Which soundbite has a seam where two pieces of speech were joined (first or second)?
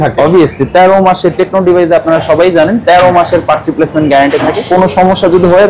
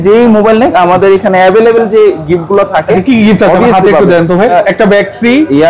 second